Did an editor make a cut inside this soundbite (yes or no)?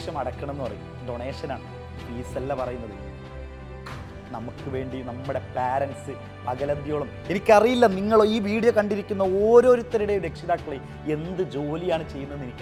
no